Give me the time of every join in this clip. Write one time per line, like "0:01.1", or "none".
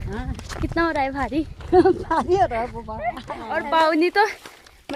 0:03.5